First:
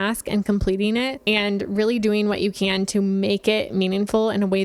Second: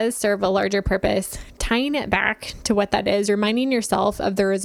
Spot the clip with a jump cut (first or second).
first